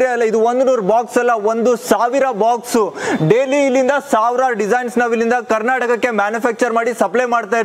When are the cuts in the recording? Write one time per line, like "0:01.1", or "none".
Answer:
none